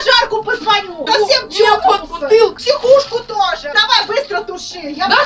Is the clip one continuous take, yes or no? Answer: no